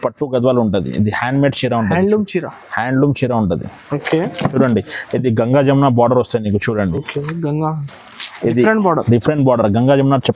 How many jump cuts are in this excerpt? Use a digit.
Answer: 0